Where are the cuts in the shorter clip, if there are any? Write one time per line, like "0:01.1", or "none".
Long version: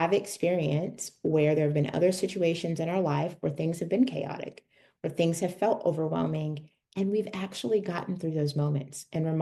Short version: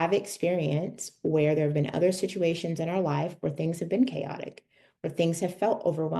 none